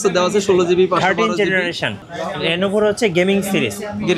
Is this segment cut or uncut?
cut